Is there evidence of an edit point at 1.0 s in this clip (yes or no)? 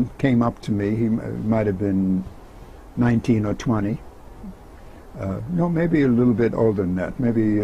no